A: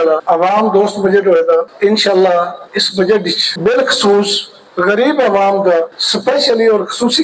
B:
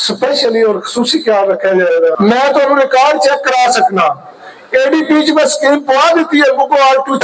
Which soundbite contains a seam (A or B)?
B